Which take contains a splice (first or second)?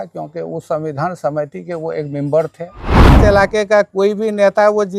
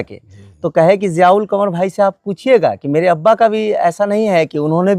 first